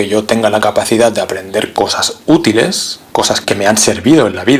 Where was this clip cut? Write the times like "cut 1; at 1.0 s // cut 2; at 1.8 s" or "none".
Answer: cut 1; at 1.7 s // cut 2; at 3.0 s